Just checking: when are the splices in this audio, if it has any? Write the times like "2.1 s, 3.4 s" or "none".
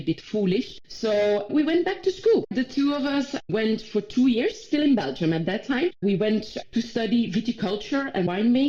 none